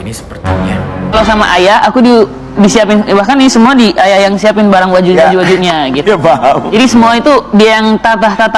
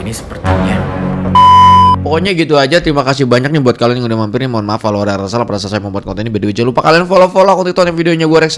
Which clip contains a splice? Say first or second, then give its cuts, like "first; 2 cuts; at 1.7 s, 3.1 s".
first; 1 cut; at 1.1 s